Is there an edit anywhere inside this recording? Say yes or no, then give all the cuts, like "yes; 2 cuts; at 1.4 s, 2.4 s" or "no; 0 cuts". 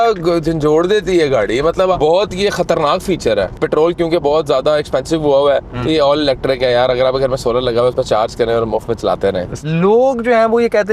yes; 3 cuts; at 2.0 s, 3.6 s, 9.6 s